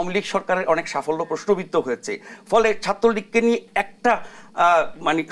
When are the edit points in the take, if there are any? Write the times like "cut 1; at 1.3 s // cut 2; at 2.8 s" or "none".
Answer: none